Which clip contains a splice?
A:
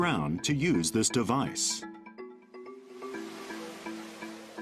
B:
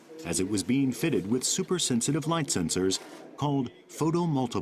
A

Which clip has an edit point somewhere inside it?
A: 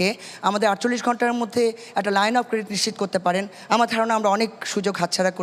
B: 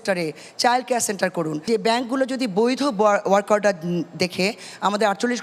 B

